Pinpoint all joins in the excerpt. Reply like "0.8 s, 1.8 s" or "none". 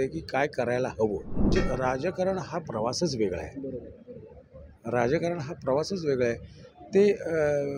1.5 s